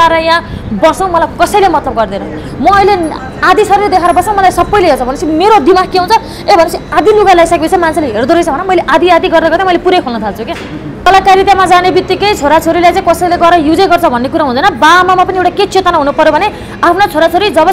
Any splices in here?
yes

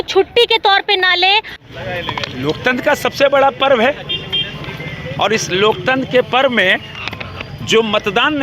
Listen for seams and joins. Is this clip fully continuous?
no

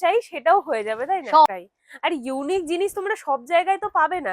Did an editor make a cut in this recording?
yes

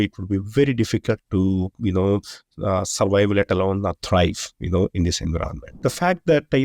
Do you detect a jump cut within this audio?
yes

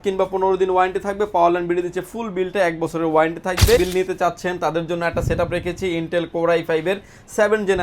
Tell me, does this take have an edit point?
yes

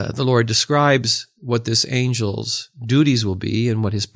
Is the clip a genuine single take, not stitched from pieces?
yes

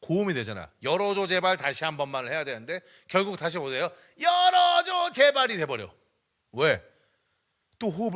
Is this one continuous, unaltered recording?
yes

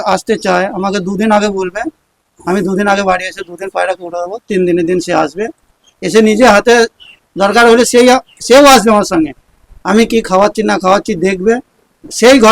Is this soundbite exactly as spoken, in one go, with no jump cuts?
yes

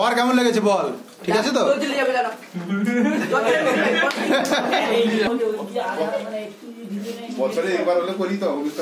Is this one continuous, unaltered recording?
no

